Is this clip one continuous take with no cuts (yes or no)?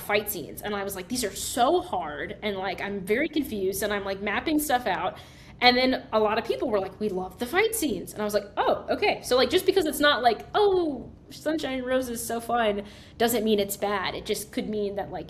yes